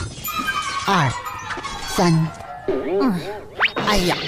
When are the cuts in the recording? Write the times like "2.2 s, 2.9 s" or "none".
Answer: none